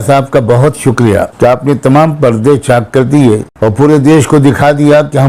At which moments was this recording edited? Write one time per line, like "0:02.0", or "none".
0:01.3
0:03.8